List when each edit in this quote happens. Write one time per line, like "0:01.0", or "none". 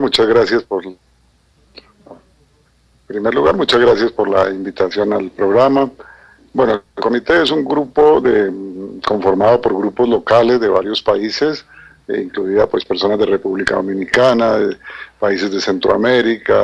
none